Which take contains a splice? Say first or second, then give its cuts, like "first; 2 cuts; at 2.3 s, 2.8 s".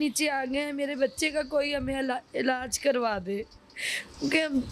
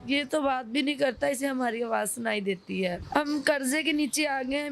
second; 1 cut; at 3.0 s